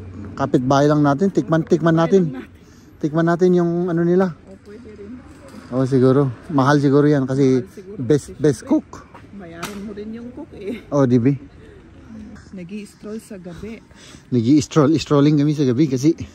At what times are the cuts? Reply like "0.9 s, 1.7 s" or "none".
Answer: 12.4 s